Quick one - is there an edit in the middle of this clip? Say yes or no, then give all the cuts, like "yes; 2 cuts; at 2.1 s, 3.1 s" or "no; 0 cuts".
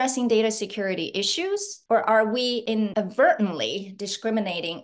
yes; 2 cuts; at 1.7 s, 2.8 s